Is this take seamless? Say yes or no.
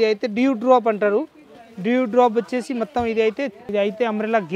no